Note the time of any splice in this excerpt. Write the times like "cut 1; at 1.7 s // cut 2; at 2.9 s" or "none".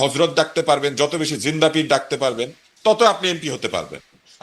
cut 1; at 2.6 s